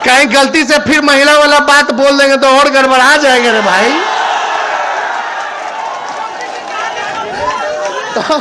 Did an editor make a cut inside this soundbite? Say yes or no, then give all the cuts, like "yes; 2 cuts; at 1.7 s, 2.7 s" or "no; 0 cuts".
no; 0 cuts